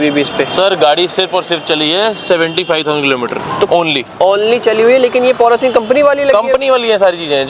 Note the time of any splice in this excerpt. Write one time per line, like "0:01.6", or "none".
none